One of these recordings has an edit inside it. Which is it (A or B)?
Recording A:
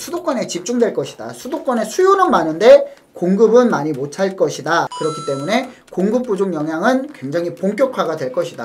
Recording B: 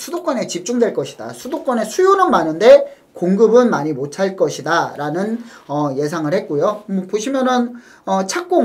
A